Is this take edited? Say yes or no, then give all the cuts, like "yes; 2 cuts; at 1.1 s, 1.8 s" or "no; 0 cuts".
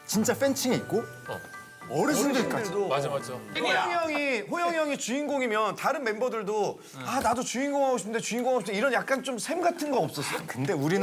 yes; 1 cut; at 3.6 s